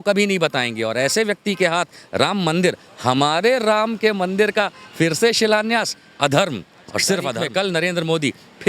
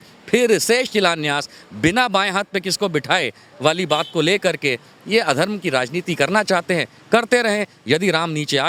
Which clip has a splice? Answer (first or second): first